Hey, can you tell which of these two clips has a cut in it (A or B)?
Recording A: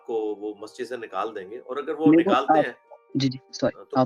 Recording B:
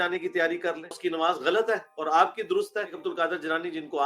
B